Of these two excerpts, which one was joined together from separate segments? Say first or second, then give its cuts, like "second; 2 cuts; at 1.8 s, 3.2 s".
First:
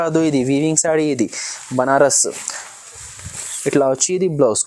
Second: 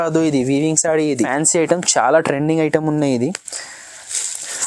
second; 1 cut; at 1.3 s